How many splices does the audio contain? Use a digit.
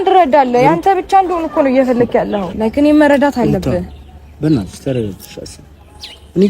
1